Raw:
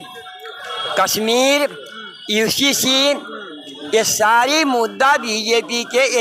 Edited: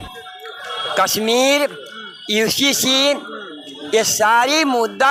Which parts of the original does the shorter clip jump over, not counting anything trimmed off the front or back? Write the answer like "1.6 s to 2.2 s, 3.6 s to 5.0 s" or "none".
none